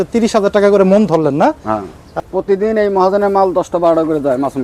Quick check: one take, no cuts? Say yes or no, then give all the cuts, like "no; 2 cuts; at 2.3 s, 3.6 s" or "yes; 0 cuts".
no; 1 cut; at 2.2 s